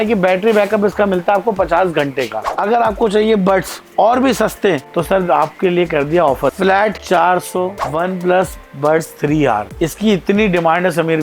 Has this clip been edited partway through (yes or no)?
yes